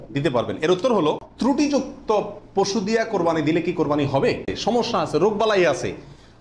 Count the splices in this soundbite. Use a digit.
2